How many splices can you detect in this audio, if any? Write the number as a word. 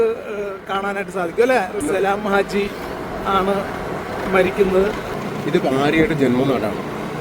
two